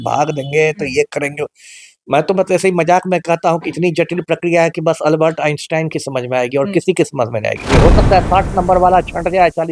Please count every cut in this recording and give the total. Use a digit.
1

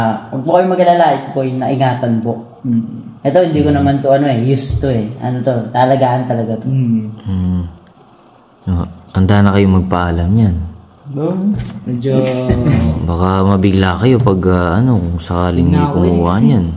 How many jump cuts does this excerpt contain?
0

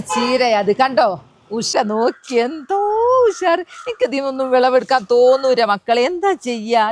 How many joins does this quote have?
1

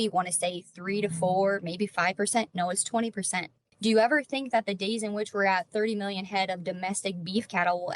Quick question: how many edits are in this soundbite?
1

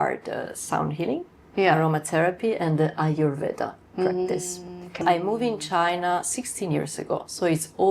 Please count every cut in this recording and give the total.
1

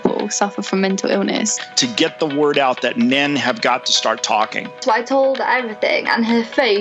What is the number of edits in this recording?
0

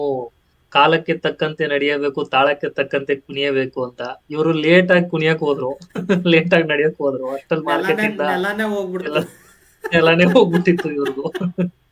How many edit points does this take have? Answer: 0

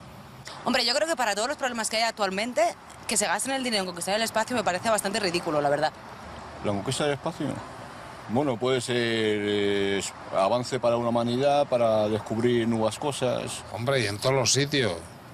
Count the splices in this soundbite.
1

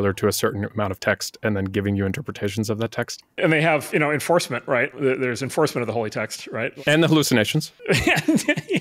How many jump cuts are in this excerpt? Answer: 4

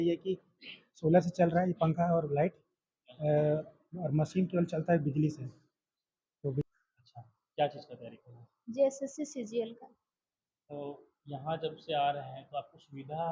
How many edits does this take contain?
1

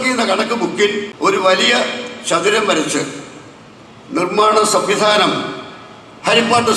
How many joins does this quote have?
1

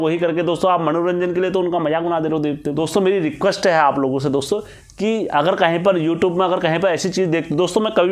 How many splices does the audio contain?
1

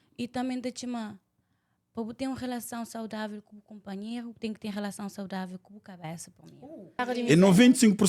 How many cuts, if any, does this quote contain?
1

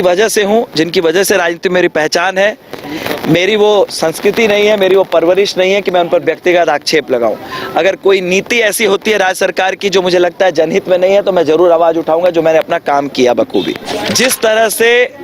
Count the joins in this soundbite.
1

